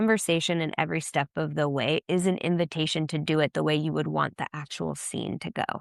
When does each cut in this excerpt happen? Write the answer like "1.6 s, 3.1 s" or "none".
none